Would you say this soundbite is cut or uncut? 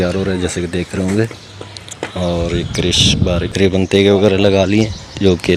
cut